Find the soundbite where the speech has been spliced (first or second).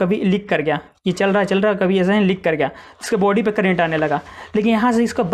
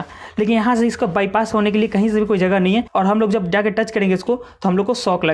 second